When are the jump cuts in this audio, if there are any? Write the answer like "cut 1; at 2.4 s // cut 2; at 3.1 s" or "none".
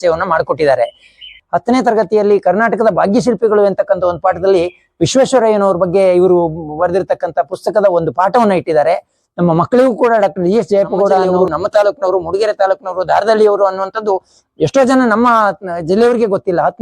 cut 1; at 1.3 s // cut 2; at 11.3 s